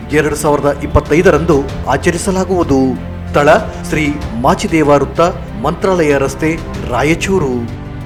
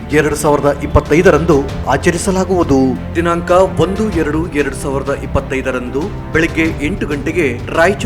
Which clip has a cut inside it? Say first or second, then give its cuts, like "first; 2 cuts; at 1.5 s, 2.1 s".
second; 1 cut; at 3.1 s